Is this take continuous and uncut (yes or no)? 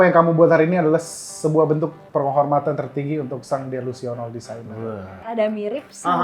no